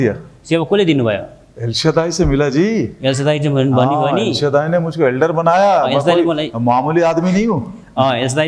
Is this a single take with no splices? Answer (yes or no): yes